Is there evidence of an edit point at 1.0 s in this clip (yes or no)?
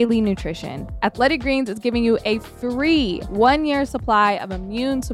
yes